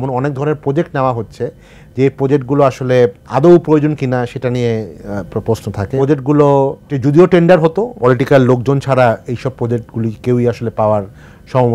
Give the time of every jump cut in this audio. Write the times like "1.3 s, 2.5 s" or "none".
3.2 s, 5.9 s, 6.9 s, 8.0 s